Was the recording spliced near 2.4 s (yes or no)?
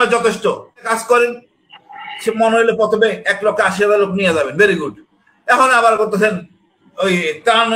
no